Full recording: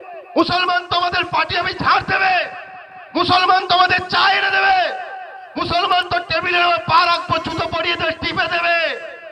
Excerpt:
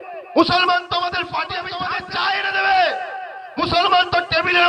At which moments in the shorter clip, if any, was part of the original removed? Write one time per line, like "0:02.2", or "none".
0:01.8